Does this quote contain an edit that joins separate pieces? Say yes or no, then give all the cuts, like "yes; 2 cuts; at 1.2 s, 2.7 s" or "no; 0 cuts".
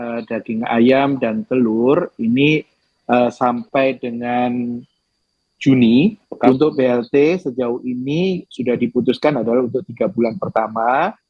yes; 1 cut; at 6.5 s